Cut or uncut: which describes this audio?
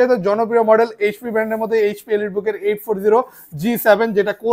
uncut